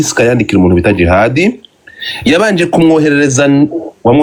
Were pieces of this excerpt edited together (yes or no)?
no